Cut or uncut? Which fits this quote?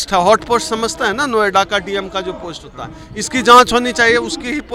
uncut